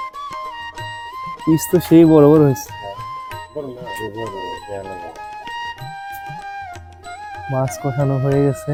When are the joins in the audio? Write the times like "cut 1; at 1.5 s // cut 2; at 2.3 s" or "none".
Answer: none